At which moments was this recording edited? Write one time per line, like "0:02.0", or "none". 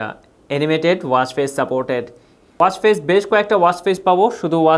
0:02.4